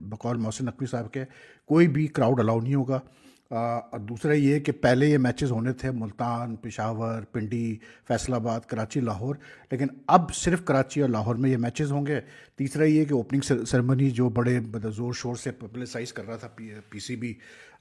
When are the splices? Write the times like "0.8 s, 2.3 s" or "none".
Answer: none